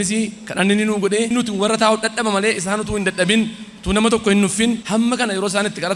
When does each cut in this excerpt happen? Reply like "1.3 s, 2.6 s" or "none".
none

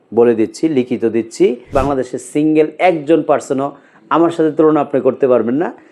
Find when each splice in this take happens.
1.7 s

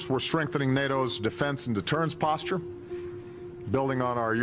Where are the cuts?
2.8 s

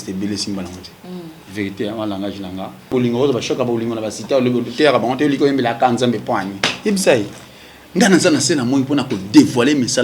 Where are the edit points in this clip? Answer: 2.9 s

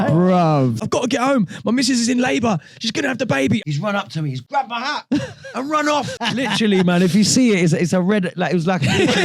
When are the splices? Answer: 0.8 s, 3.6 s, 6.1 s

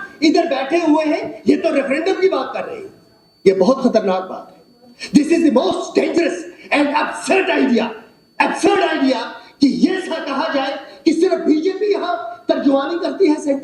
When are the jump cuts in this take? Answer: none

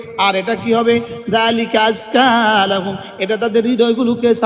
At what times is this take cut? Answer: none

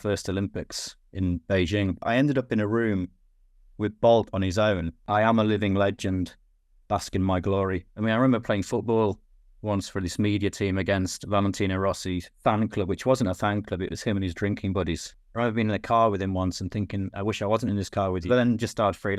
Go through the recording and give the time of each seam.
2.0 s, 4.9 s, 7.9 s, 15.1 s, 18.3 s

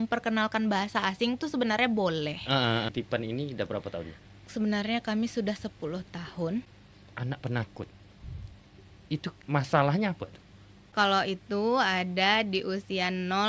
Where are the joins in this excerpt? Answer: 2.9 s, 6.8 s, 9.3 s, 10.9 s

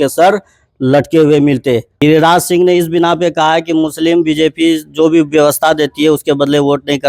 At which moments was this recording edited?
1.9 s

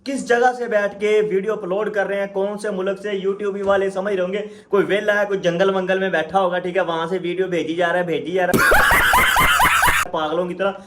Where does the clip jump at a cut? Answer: none

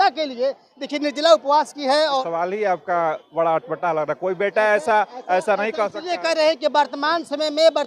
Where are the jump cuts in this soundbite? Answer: 2.2 s

